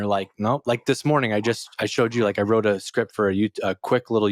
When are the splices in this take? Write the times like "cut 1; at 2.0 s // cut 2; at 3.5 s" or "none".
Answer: none